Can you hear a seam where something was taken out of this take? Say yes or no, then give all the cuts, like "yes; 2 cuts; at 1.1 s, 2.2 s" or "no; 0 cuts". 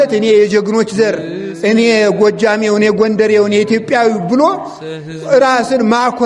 no; 0 cuts